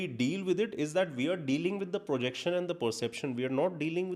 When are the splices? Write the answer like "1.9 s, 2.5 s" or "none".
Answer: none